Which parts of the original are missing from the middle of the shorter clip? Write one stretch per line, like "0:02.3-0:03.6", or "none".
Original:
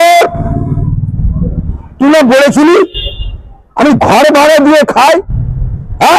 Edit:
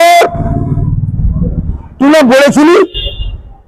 none